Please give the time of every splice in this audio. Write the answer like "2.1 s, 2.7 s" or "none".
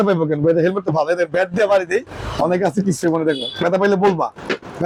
none